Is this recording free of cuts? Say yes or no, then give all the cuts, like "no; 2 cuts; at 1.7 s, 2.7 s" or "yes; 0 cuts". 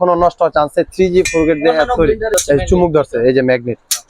no; 1 cut; at 2.4 s